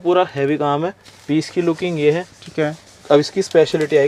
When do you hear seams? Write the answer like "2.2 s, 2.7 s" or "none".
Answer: none